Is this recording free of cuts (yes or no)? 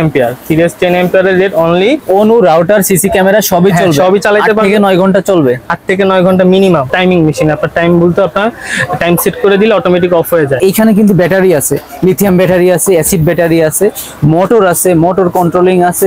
no